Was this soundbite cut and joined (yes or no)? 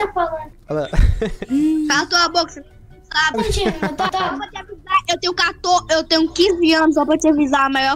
yes